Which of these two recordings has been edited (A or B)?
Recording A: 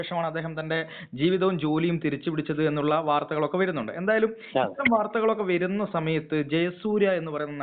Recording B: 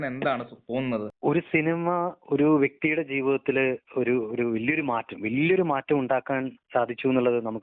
B